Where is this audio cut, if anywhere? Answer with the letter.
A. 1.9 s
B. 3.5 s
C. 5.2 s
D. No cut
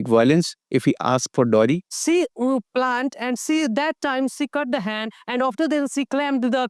A